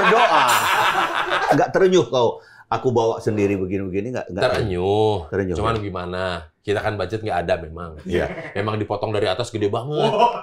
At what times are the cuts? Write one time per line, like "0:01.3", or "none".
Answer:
0:01.4